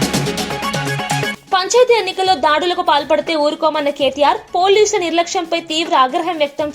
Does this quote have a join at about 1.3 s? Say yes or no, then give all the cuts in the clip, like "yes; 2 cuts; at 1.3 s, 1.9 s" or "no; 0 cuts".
yes; 1 cut; at 1.3 s